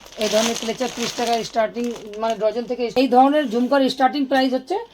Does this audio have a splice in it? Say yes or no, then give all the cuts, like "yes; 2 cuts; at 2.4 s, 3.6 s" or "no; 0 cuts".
yes; 1 cut; at 2.9 s